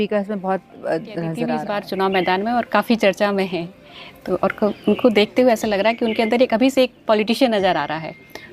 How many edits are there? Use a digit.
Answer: 1